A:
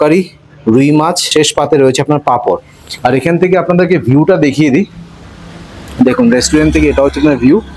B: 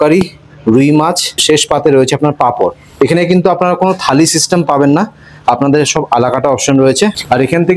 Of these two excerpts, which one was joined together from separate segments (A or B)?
A